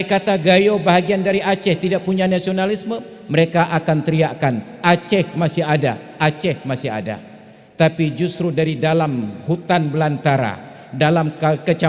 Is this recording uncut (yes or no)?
yes